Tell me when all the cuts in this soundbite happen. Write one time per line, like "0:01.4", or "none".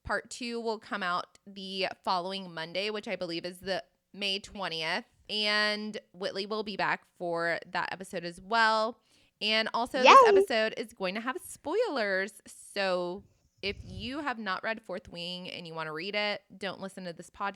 0:04.0
0:05.2